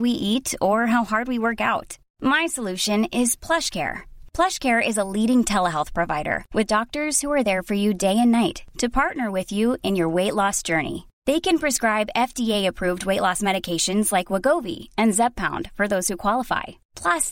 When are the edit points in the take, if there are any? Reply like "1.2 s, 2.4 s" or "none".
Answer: none

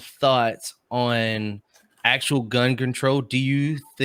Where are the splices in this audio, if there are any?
none

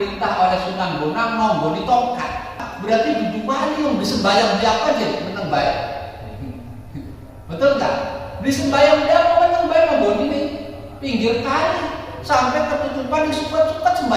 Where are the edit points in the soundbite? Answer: 2.7 s

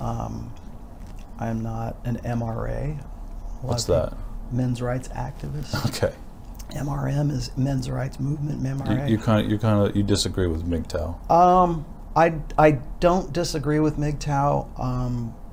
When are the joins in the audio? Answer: none

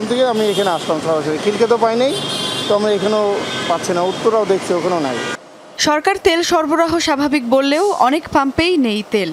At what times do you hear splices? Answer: none

